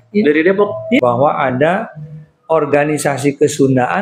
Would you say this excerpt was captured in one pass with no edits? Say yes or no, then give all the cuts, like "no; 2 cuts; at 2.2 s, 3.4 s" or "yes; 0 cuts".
no; 1 cut; at 1.0 s